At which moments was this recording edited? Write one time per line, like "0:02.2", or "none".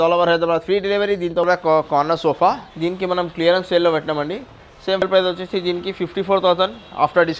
0:01.4
0:05.0